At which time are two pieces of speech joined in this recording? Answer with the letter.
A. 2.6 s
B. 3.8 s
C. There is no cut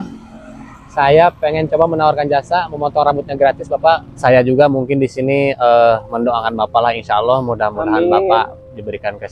B